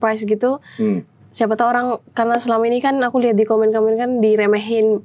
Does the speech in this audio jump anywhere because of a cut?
no; 0 cuts

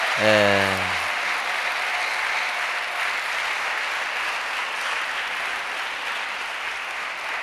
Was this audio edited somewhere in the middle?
no; 0 cuts

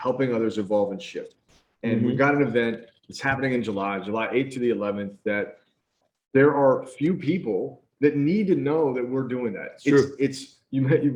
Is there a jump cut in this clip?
no; 0 cuts

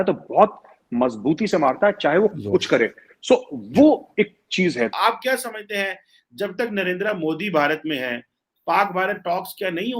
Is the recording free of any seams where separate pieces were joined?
no; 1 cut; at 4.9 s

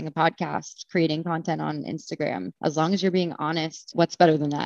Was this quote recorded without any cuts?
no; 2 cuts; at 2.5 s, 3.9 s

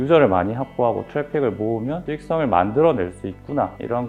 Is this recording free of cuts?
yes; 0 cuts

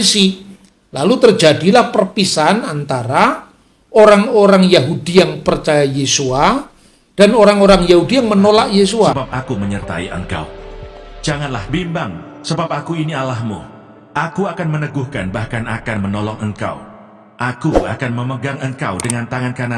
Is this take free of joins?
no; 1 cut; at 9.3 s

